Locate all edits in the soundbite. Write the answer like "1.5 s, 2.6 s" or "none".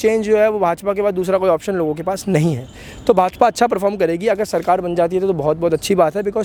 none

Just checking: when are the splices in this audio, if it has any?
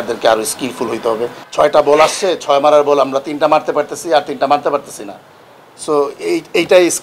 1.4 s

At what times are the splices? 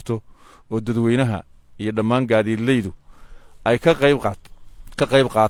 none

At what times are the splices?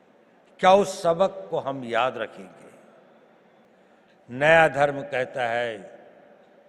3.7 s

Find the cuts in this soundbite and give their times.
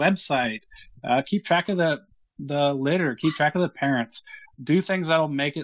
none

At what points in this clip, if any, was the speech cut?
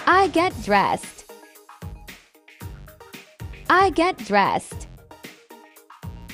none

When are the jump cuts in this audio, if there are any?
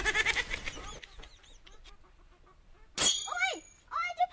none

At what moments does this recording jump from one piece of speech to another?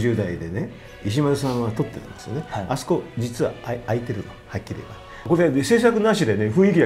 1.0 s, 5.1 s

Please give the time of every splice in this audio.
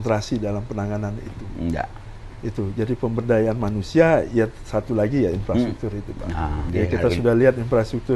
6.6 s

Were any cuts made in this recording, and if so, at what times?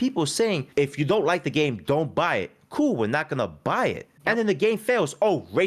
none

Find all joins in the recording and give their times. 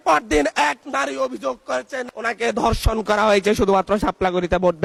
none

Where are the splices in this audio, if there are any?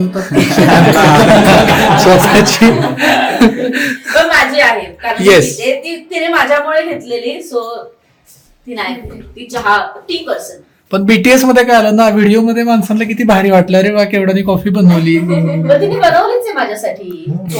none

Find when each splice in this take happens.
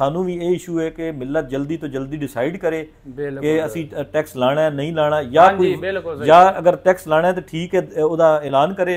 none

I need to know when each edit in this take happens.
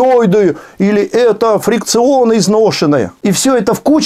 3.1 s

